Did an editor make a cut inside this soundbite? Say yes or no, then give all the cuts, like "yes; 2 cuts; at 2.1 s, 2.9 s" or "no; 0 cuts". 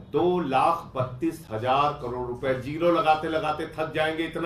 no; 0 cuts